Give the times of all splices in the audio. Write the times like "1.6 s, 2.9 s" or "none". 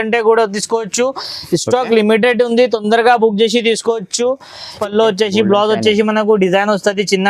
4.7 s